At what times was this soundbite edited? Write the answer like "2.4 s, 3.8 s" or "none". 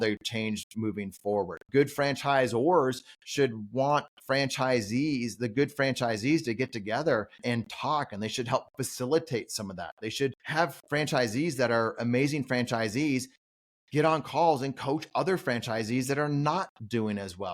1.7 s, 7.4 s, 10.8 s